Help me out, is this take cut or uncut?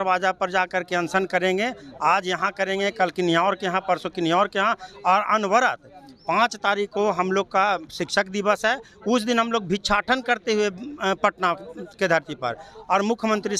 uncut